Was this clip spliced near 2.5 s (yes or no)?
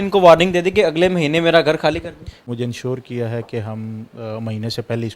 yes